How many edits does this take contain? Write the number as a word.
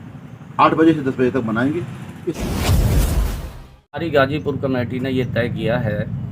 two